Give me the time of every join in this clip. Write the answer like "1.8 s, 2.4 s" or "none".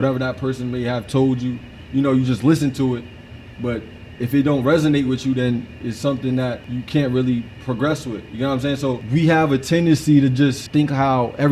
6.6 s, 9.0 s, 10.6 s